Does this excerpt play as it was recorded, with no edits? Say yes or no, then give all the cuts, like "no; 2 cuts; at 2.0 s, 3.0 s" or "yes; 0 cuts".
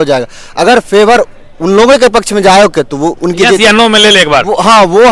yes; 0 cuts